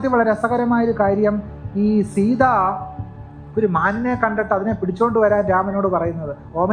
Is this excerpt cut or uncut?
uncut